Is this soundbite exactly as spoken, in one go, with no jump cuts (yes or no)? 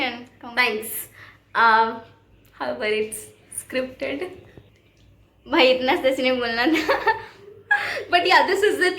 yes